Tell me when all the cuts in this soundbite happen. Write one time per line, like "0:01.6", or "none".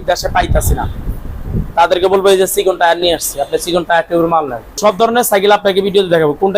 0:04.8